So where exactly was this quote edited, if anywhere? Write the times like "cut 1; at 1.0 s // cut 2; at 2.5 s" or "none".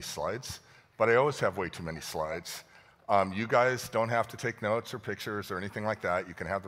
cut 1; at 5.4 s